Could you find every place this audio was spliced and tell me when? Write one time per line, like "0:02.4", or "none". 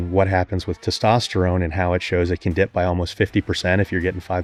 none